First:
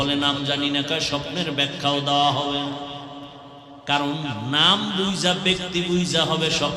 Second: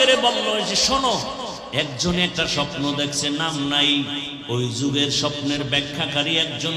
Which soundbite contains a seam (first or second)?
second